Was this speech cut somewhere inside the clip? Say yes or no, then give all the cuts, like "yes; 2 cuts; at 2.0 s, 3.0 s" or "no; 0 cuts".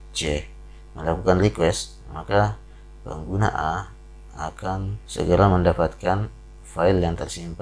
yes; 1 cut; at 5.0 s